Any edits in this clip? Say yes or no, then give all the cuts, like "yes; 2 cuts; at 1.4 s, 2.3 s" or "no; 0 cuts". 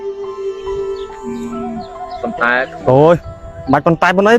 no; 0 cuts